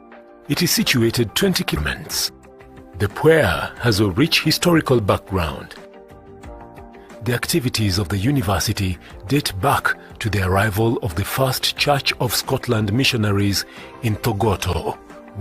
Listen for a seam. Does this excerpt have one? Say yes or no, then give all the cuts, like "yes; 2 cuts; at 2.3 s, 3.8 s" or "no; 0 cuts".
yes; 1 cut; at 1.8 s